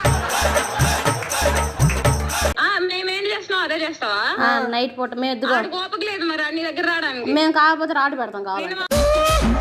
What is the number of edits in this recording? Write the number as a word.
one